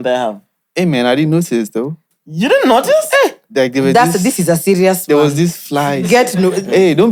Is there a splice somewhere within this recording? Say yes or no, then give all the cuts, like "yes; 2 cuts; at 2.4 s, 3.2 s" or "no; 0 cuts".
no; 0 cuts